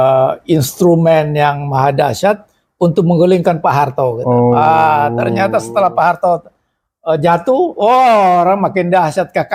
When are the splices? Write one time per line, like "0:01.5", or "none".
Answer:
none